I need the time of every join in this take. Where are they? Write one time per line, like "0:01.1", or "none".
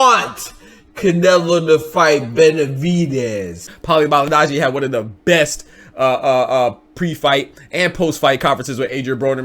0:03.7